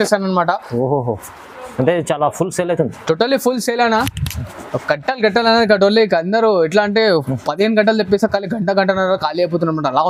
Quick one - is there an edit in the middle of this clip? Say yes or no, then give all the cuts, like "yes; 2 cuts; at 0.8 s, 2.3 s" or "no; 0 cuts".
no; 0 cuts